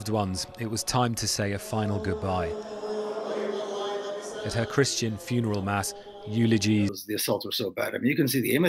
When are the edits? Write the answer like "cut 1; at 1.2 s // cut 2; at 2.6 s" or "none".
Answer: cut 1; at 7.1 s